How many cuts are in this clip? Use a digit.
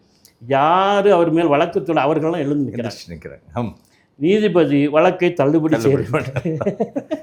0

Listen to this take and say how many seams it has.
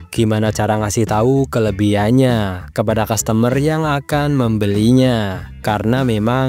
0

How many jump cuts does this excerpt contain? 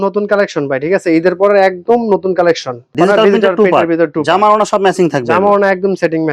1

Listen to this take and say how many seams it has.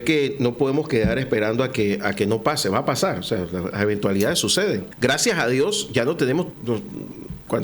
2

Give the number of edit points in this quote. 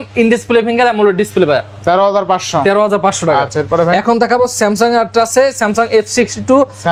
0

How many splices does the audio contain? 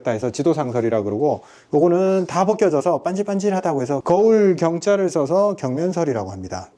0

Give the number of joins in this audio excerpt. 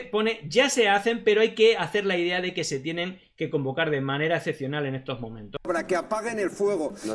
1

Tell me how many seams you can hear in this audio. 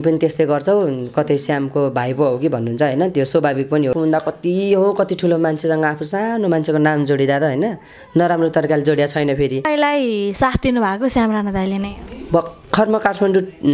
2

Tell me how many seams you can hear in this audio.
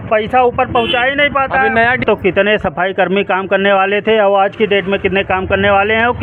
1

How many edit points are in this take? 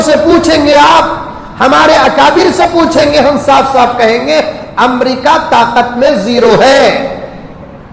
0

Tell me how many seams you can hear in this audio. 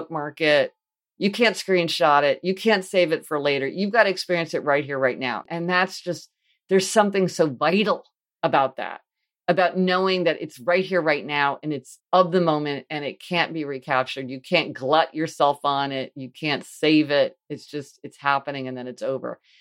2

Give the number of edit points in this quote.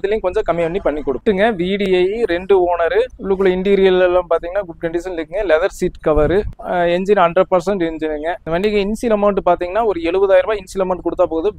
3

